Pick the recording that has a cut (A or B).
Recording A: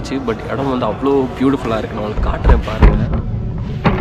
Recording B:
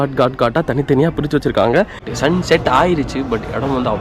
B